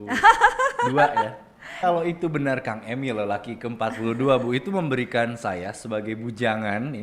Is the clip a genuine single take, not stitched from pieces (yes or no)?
no